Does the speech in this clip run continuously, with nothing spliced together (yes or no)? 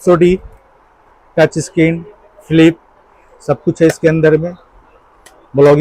yes